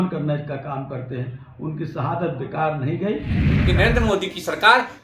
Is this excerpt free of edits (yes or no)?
no